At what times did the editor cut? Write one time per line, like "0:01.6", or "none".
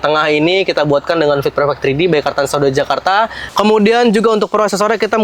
0:03.4